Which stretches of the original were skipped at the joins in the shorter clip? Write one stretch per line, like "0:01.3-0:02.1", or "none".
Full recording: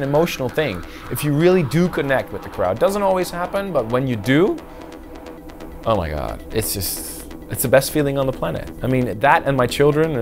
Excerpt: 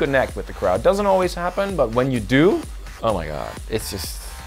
0:04.8-0:05.6